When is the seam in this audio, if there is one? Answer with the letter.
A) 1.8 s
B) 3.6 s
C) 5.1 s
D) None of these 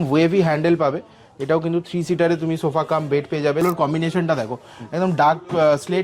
B